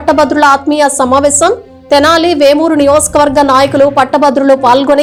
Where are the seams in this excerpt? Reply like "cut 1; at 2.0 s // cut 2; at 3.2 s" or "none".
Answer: none